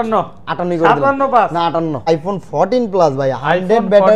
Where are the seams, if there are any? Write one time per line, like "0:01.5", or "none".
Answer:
0:02.1